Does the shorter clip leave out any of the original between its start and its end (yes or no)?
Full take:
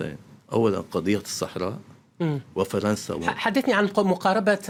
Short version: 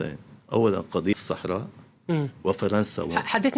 yes